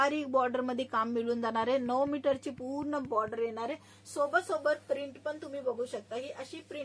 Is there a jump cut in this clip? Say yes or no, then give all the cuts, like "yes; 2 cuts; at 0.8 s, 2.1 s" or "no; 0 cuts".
no; 0 cuts